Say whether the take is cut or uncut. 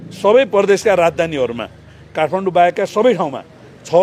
uncut